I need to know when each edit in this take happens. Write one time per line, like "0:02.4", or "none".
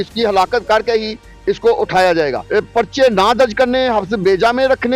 0:02.4